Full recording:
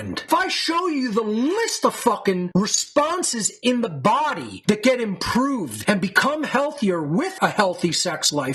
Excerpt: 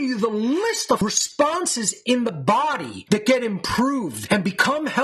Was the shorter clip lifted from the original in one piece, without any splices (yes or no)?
no